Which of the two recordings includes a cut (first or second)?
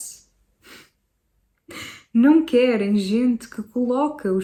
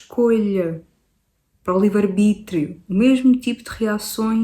second